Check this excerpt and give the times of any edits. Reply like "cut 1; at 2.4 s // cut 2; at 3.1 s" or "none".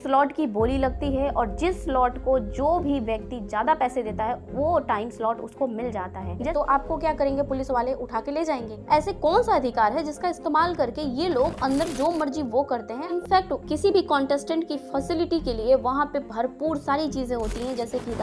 cut 1; at 6.5 s // cut 2; at 8.7 s // cut 3; at 13.2 s

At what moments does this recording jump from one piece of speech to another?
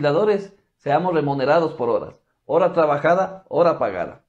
none

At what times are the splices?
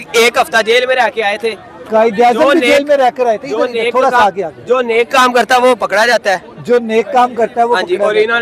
none

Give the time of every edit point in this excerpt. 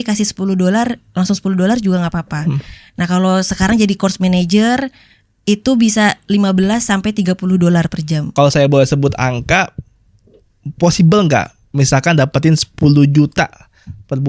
cut 1; at 8.3 s

